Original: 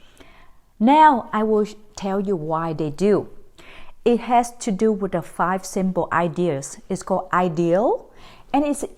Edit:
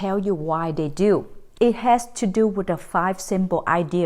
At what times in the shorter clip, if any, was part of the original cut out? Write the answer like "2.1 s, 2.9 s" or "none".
1.4 s